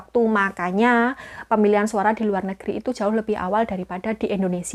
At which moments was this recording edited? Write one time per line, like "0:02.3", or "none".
none